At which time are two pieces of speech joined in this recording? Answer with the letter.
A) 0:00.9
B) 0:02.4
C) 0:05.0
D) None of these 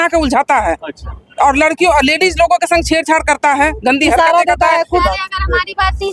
C